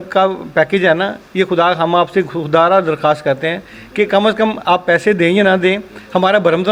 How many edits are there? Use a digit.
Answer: 0